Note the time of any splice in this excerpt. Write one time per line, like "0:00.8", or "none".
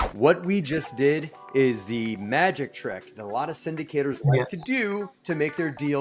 none